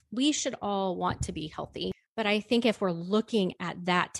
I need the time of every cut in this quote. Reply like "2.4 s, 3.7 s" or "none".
2.0 s